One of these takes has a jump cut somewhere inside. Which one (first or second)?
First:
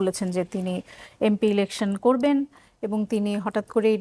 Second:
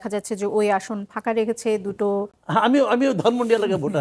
second